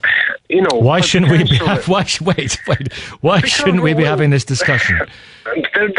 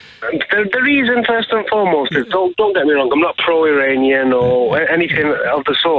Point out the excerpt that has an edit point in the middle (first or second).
second